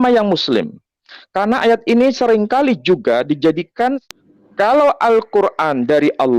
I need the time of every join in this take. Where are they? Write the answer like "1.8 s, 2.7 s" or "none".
4.0 s